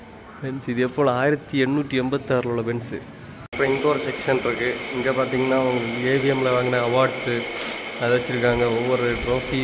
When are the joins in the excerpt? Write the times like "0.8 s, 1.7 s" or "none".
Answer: none